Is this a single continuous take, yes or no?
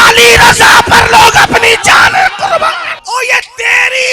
no